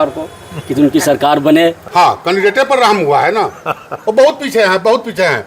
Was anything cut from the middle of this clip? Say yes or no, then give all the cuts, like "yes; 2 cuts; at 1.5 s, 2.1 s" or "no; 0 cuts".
yes; 1 cut; at 1.8 s